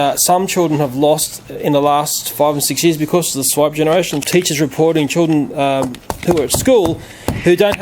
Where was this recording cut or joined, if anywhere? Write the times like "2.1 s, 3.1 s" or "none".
4.2 s